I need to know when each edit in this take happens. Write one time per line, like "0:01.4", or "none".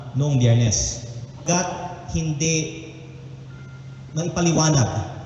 0:01.4